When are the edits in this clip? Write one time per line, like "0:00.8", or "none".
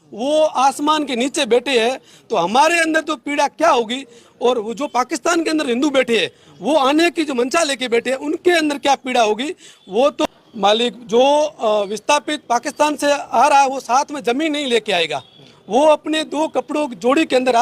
0:10.2

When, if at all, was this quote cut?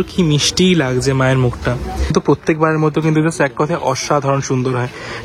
0:02.1

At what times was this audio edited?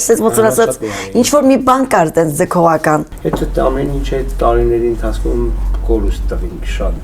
0:03.1

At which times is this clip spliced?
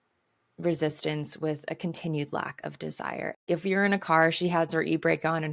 0:03.4

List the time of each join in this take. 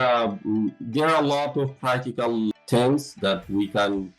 0:02.5

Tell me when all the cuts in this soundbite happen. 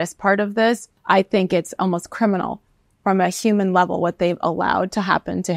0:00.9

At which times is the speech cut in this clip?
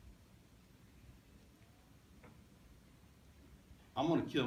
none

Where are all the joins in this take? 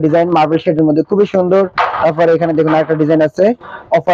none

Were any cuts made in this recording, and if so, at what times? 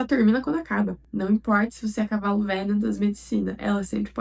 0:01.0

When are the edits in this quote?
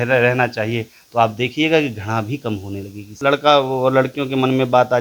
0:03.0

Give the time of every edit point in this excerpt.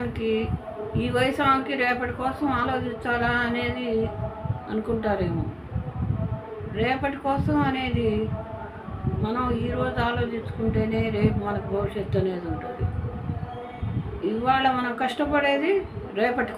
none

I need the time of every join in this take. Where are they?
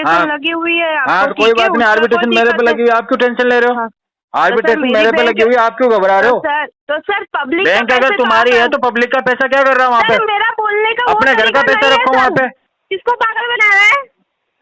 0:06.7
0:12.7

